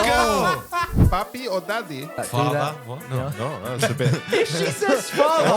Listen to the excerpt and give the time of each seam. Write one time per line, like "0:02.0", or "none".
0:01.0
0:02.1